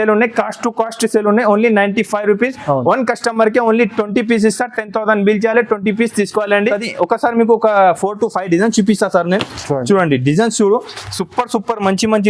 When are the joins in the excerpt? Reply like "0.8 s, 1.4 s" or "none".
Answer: 6.7 s